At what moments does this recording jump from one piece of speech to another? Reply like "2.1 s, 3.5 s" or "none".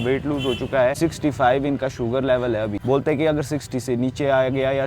1.0 s, 2.8 s